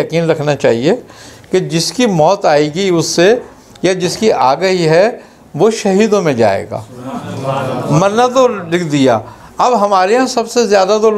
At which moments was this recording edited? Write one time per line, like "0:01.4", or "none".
none